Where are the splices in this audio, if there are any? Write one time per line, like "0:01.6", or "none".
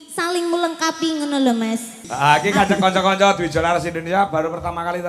0:02.1